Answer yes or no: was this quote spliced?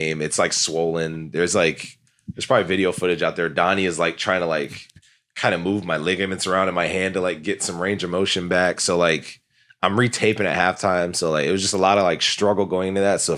no